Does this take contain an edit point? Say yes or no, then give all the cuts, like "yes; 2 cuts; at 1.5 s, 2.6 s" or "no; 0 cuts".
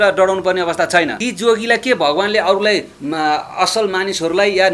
yes; 1 cut; at 1.2 s